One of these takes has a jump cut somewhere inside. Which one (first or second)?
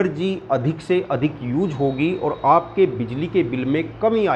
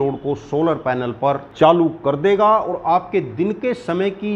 second